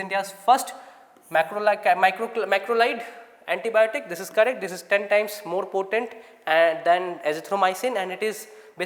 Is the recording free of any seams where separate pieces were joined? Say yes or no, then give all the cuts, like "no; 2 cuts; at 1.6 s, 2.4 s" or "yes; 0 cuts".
yes; 0 cuts